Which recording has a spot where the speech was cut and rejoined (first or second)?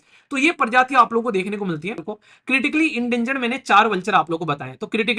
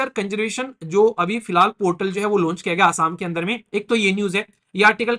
first